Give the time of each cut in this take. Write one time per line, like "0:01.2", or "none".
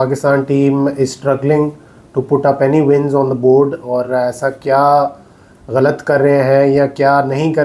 none